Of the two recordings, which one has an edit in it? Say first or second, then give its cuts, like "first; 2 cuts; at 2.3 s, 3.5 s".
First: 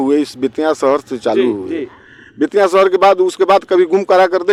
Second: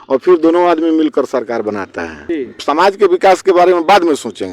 second; 1 cut; at 2.2 s